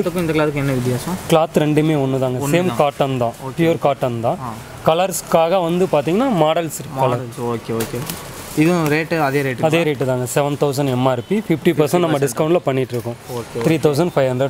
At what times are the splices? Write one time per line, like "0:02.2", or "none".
none